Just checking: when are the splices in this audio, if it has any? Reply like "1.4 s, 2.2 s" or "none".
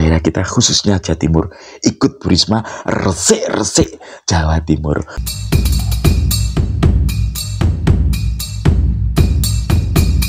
5.2 s